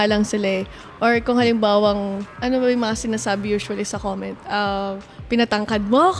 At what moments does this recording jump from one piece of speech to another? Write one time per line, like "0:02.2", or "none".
0:02.3